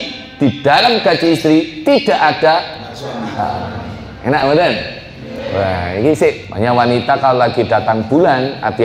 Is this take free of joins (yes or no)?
no